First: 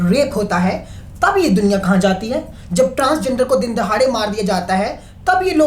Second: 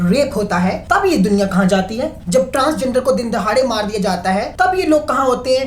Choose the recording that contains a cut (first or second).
second